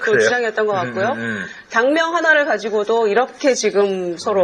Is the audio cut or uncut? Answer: cut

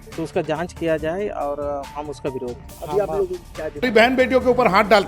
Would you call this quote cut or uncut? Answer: cut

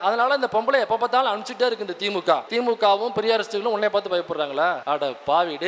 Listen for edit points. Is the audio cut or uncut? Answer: cut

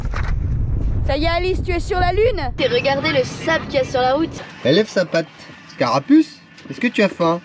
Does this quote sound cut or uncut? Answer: cut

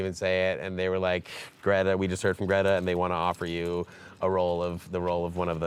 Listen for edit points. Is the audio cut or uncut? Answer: uncut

